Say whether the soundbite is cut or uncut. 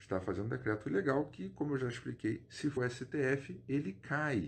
cut